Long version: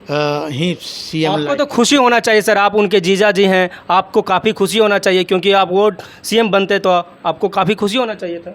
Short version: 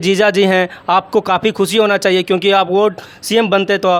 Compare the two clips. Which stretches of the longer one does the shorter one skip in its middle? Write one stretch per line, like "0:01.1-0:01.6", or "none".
none